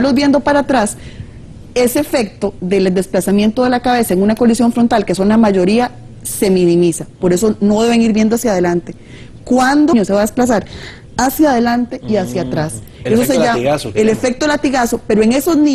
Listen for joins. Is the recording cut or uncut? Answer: uncut